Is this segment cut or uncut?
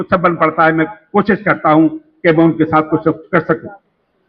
uncut